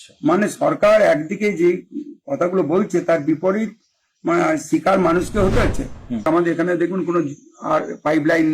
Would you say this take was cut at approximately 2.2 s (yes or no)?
no